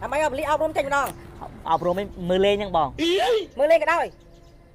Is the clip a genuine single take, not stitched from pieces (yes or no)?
yes